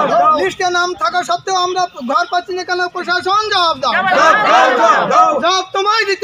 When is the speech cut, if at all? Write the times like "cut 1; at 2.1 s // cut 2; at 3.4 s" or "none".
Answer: none

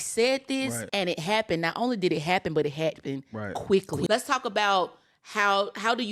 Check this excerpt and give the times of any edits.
cut 1; at 0.8 s // cut 2; at 4.1 s

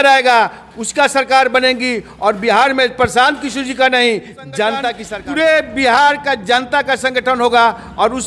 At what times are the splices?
cut 1; at 5.0 s

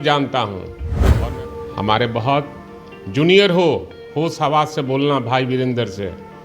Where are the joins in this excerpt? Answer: cut 1; at 1.1 s

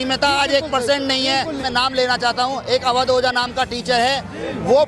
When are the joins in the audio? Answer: cut 1; at 1.6 s

